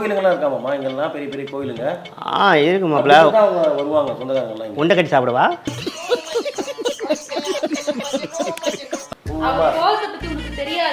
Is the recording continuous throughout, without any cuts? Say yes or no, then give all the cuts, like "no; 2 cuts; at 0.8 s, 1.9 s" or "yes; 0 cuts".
no; 1 cut; at 9.1 s